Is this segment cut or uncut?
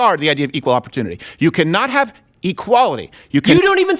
uncut